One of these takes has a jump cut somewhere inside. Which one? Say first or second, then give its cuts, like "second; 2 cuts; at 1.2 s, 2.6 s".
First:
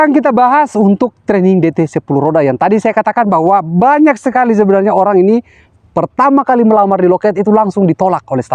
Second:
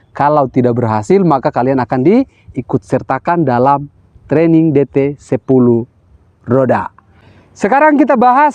second; 1 cut; at 6.9 s